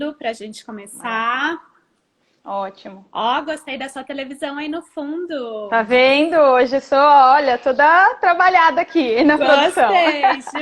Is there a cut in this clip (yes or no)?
no